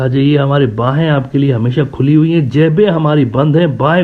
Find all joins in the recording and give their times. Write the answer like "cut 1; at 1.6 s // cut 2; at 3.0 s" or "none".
none